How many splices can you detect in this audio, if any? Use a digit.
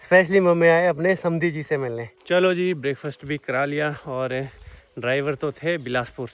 1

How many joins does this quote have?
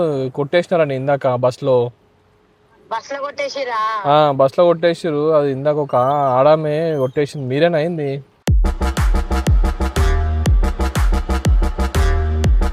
0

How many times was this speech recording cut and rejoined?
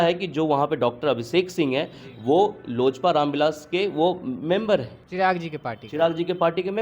1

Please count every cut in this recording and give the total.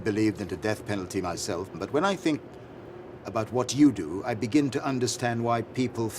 1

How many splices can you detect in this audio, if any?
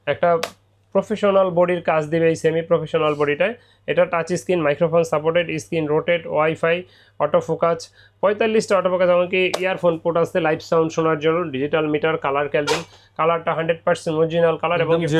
0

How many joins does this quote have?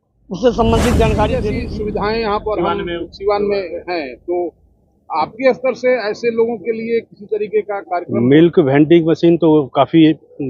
1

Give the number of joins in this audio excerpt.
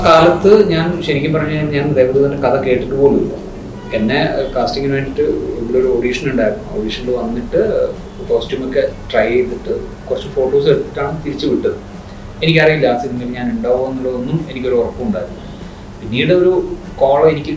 0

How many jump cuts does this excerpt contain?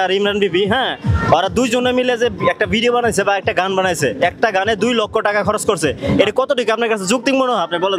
0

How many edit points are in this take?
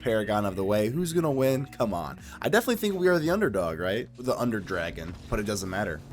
1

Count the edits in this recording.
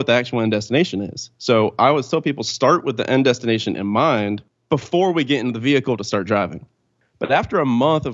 1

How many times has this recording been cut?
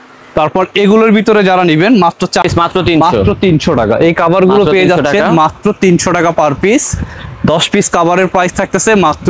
1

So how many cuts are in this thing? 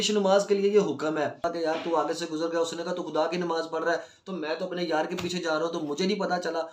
1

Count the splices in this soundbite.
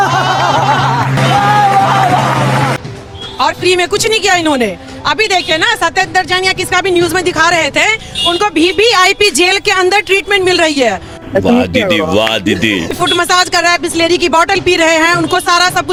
0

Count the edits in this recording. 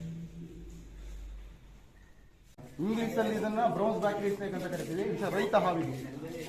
1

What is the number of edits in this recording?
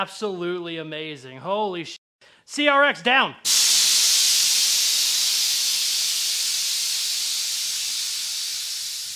0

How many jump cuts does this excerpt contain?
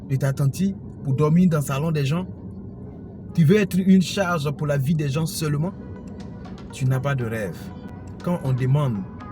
1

